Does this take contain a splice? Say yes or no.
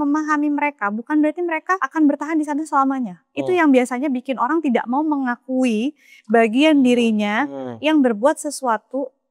yes